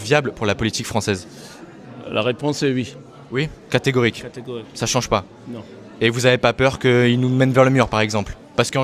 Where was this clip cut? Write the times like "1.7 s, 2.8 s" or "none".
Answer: none